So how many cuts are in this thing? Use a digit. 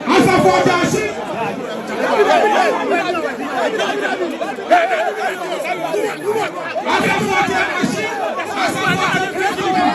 0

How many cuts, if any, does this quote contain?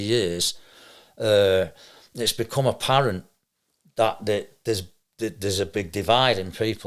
0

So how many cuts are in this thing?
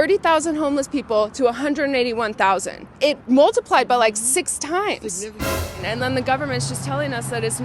1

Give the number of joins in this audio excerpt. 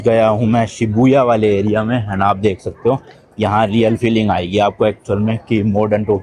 0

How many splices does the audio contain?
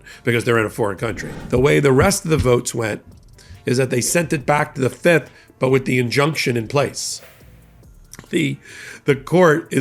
1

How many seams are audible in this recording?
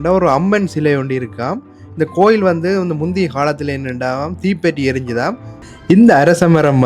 1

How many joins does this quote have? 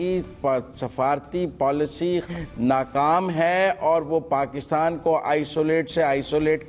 1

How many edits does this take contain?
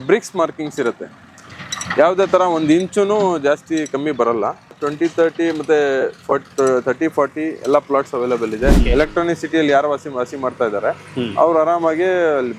2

